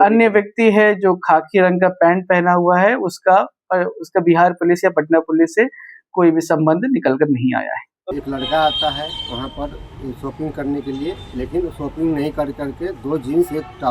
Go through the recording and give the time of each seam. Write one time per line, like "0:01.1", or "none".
0:08.1